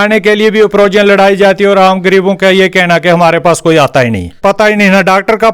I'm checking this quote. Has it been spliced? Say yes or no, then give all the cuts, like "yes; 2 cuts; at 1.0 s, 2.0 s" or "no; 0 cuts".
yes; 1 cut; at 4.4 s